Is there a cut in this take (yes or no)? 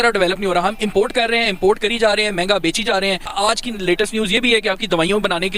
yes